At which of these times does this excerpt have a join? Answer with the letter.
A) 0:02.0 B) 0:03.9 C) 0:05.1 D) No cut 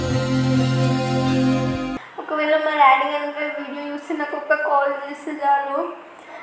A